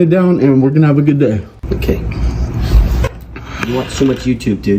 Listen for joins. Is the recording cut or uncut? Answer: cut